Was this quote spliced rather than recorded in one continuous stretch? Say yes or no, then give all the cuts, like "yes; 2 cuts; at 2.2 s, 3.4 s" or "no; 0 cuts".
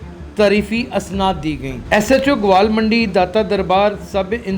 yes; 1 cut; at 1.8 s